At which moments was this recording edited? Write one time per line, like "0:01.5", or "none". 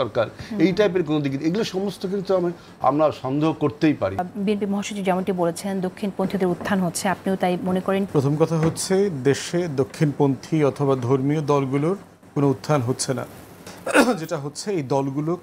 0:04.3
0:08.1

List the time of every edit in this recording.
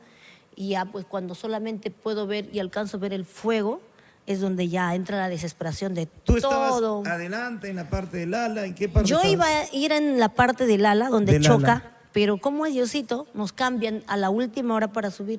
none

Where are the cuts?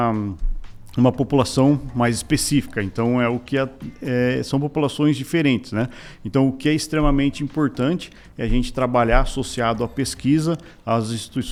none

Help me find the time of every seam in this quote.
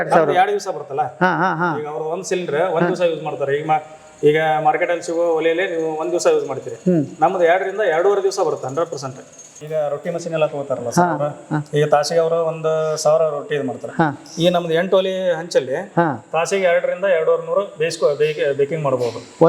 0:09.5

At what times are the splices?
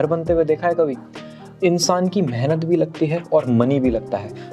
none

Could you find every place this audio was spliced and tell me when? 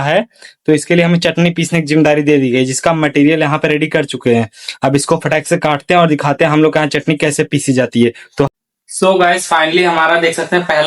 0:08.5

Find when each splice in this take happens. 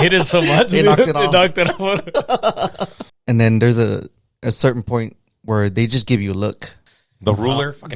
0:03.1
0:06.8

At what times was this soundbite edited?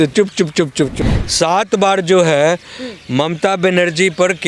0:01.0

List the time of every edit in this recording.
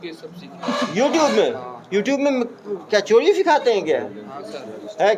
none

